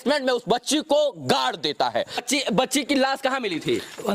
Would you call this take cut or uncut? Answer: cut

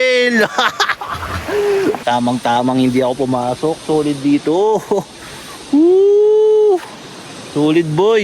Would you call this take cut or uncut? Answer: cut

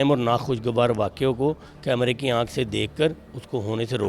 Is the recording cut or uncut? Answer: uncut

